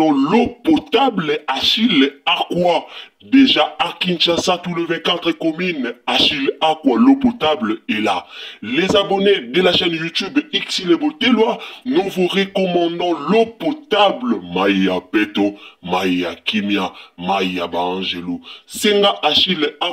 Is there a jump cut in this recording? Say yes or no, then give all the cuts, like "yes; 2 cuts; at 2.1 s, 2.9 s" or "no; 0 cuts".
no; 0 cuts